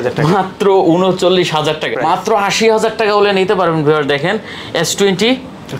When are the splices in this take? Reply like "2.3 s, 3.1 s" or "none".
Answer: 1.9 s

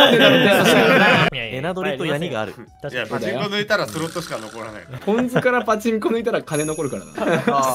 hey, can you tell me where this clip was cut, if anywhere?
1.3 s, 4.9 s

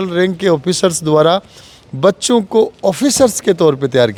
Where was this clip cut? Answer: none

